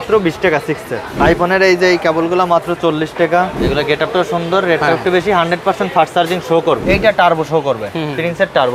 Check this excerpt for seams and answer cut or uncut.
cut